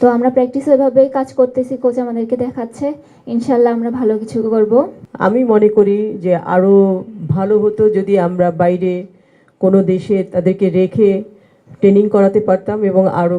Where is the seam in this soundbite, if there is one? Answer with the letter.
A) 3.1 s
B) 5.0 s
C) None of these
B